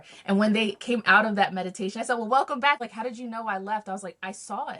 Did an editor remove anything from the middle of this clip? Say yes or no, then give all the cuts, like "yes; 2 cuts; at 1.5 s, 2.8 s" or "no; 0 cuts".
yes; 1 cut; at 2.8 s